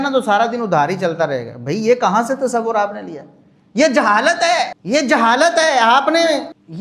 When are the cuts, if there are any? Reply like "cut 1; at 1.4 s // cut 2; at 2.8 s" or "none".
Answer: none